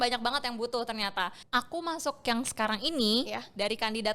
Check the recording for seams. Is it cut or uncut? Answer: cut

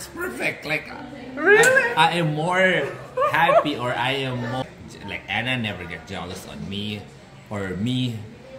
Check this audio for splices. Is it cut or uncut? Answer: cut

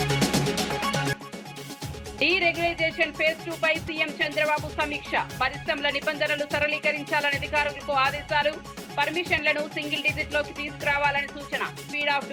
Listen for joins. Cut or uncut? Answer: cut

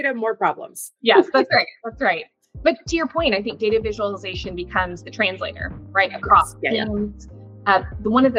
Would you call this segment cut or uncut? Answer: uncut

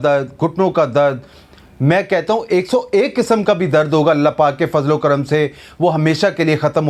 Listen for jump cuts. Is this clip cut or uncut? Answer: uncut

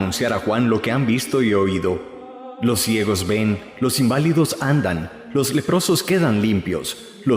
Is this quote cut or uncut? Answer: cut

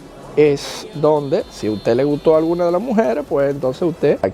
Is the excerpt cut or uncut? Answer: uncut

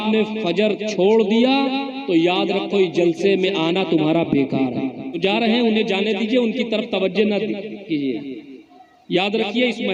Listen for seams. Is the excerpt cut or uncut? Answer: cut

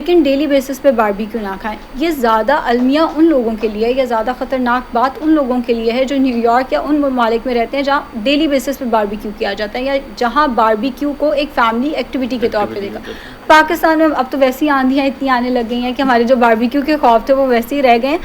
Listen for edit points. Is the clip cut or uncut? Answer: uncut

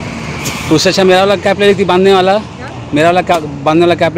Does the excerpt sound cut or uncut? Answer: uncut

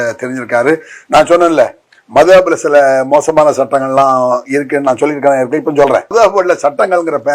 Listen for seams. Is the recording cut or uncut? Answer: cut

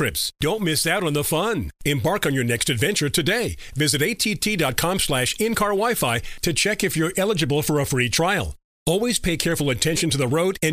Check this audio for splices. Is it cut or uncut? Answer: uncut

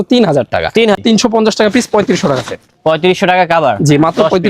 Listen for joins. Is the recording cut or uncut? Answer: cut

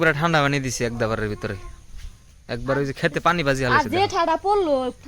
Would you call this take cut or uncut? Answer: uncut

